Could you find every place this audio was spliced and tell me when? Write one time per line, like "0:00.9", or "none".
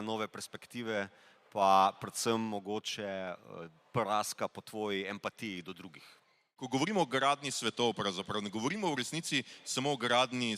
0:06.6